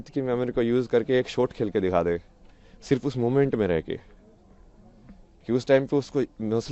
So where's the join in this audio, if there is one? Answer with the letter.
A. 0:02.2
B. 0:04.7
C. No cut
C